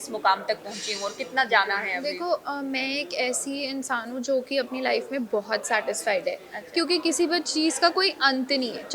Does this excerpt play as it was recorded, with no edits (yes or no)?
yes